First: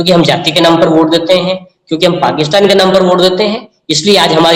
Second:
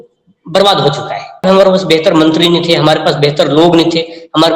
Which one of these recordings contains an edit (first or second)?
second